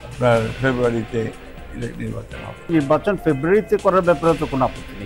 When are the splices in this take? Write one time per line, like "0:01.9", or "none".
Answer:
0:02.7